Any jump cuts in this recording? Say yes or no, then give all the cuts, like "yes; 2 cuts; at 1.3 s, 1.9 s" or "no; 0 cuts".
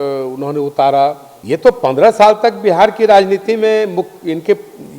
yes; 1 cut; at 1.3 s